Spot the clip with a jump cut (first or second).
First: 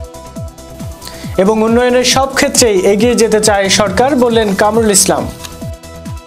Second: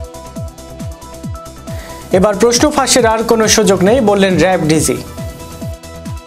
second